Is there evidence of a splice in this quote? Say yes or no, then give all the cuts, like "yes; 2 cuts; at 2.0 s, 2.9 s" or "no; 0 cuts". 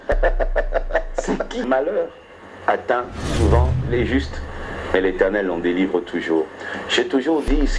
yes; 1 cut; at 1.7 s